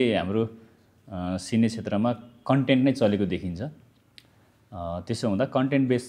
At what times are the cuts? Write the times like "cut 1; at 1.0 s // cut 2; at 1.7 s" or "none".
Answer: none